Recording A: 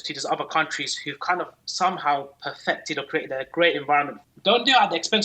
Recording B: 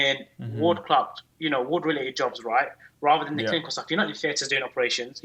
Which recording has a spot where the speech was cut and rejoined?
A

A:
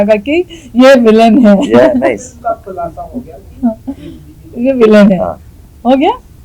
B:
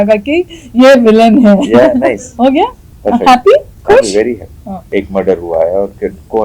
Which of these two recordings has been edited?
B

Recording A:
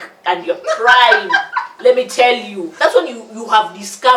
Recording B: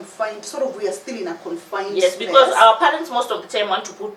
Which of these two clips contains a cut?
A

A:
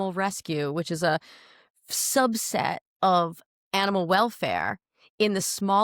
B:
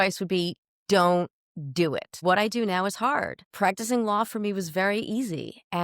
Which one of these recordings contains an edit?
B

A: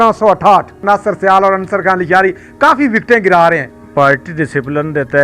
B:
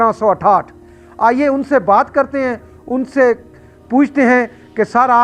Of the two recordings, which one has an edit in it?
A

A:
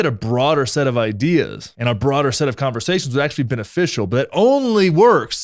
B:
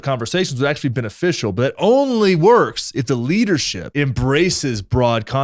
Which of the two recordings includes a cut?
B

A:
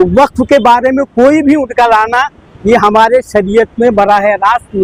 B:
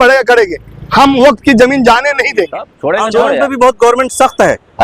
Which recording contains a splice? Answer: B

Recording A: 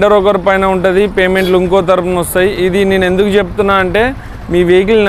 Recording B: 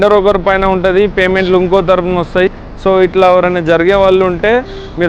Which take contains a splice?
B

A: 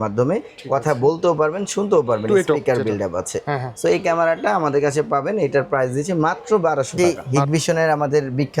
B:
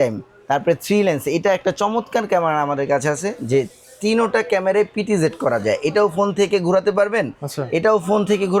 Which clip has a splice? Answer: A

